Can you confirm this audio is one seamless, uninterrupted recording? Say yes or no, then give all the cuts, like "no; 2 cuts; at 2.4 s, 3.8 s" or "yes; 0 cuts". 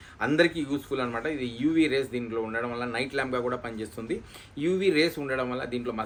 yes; 0 cuts